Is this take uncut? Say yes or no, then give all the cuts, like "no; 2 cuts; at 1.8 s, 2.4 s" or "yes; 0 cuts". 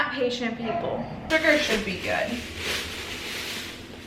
no; 1 cut; at 1.2 s